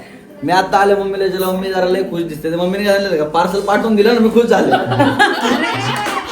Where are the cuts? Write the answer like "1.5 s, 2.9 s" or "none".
4.8 s